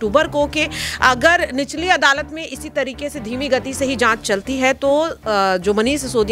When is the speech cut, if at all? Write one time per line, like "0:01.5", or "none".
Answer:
none